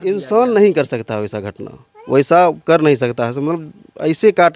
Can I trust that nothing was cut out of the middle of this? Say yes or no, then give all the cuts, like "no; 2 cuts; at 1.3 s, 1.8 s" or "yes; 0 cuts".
yes; 0 cuts